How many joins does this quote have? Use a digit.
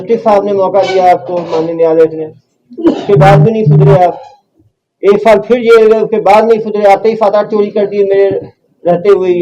0